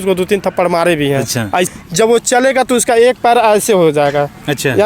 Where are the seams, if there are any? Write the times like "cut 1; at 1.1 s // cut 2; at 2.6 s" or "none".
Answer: cut 1; at 1.7 s